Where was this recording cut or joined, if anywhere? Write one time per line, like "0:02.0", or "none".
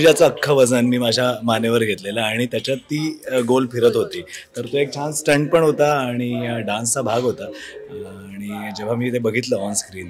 none